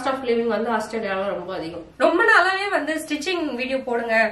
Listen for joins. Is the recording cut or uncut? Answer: cut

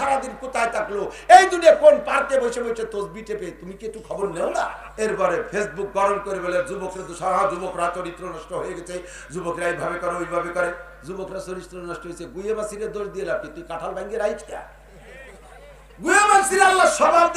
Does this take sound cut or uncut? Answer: cut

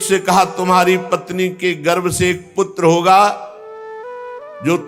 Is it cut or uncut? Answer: uncut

